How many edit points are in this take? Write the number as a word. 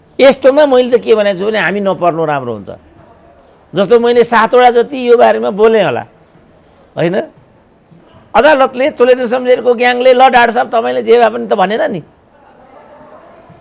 zero